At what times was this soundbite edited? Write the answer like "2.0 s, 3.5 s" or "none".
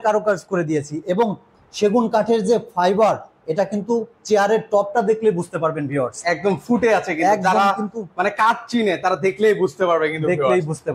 none